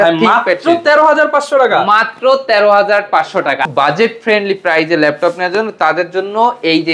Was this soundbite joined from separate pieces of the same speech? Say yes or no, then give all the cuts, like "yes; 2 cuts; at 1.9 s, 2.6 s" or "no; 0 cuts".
yes; 1 cut; at 3.7 s